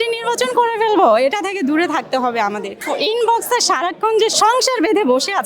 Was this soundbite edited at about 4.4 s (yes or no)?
no